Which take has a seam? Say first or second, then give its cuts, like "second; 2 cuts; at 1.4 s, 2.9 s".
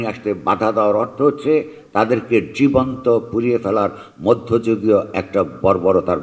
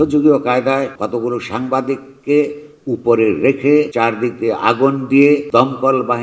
second; 3 cuts; at 0.9 s, 3.9 s, 5.4 s